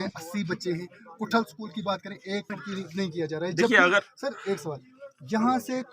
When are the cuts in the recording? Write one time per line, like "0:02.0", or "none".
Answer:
0:02.6